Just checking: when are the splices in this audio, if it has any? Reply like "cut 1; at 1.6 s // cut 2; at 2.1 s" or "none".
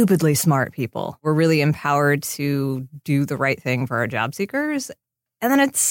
cut 1; at 1.2 s